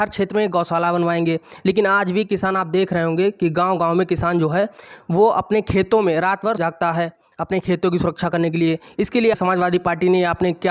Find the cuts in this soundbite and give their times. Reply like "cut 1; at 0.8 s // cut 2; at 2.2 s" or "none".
cut 1; at 9.4 s

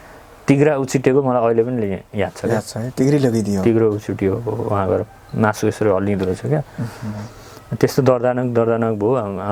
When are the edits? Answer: none

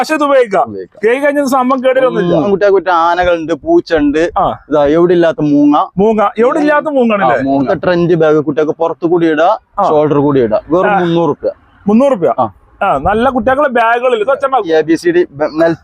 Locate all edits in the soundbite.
cut 1; at 2.5 s // cut 2; at 7.7 s // cut 3; at 14.7 s

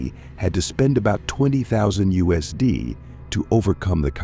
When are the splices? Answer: none

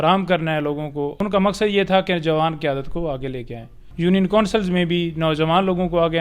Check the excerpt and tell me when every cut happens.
cut 1; at 1.1 s // cut 2; at 3.8 s

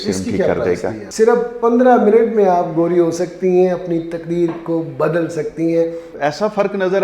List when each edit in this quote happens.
cut 1; at 1.0 s // cut 2; at 6.1 s

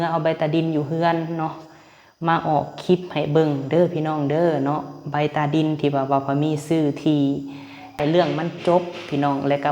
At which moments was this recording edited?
cut 1; at 7.9 s

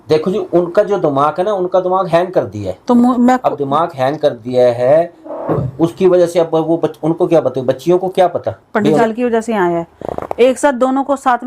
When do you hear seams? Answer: cut 1; at 9.0 s

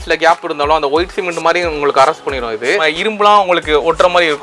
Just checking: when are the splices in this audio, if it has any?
cut 1; at 2.8 s

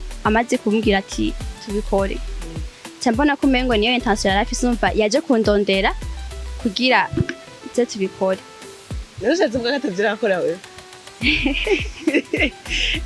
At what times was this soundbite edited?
cut 1; at 1.5 s

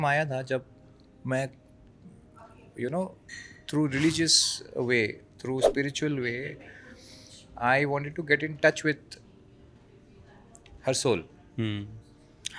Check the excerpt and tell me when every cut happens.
none

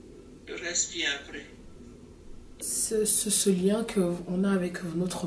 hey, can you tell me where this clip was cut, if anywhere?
cut 1; at 2.5 s

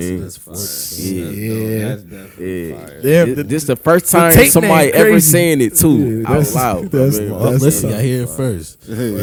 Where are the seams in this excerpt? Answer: none

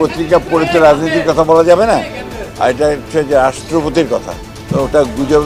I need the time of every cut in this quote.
none

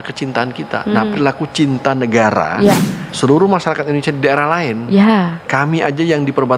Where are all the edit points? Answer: cut 1; at 3.1 s

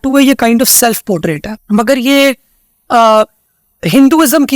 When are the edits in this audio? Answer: cut 1; at 1.5 s

